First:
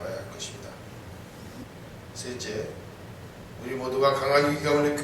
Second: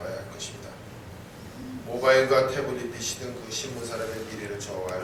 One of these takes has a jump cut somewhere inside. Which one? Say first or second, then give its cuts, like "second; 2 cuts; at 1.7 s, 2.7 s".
first; 1 cut; at 1.6 s